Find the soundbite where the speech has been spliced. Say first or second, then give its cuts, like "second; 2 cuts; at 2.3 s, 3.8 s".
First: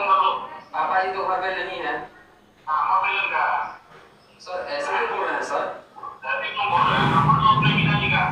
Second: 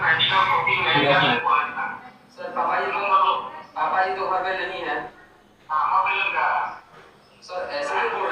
second; 1 cut; at 1.4 s